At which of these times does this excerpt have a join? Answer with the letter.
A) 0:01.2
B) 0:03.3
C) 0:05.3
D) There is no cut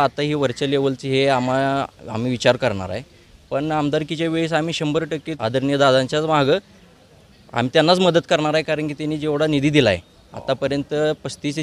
C